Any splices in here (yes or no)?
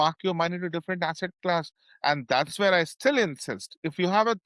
no